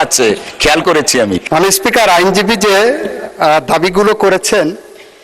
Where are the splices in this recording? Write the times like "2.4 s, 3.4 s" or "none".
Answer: 1.4 s